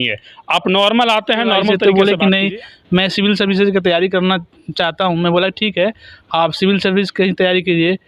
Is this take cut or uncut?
cut